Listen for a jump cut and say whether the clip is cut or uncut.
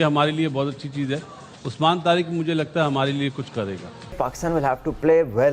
cut